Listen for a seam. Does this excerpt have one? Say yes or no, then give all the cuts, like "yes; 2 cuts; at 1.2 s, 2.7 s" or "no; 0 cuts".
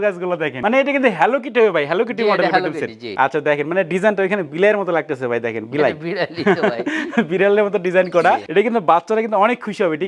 no; 0 cuts